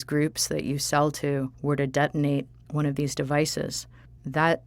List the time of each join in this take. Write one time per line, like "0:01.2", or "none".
0:01.5
0:02.6
0:03.8